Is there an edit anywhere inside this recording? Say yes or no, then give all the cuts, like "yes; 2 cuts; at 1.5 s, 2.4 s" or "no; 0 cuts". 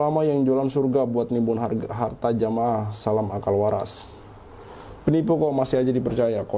no; 0 cuts